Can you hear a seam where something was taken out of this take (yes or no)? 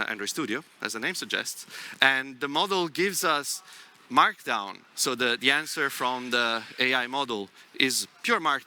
no